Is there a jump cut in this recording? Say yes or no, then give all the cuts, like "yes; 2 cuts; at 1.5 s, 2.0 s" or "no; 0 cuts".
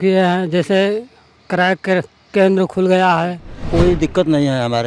yes; 1 cut; at 3.7 s